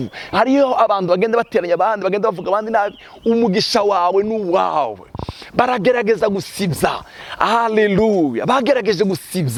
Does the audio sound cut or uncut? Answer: uncut